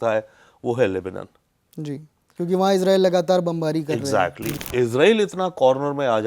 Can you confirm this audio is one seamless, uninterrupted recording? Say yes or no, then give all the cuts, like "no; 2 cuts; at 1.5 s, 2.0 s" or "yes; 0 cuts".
no; 1 cut; at 4.5 s